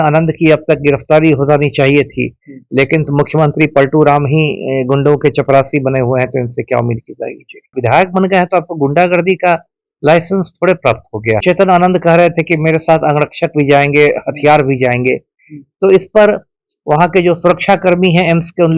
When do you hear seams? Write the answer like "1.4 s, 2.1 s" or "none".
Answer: 7.7 s, 11.4 s